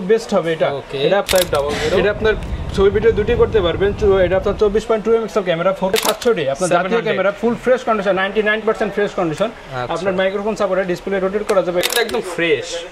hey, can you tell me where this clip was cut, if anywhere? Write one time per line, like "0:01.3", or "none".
0:01.2
0:05.9
0:11.8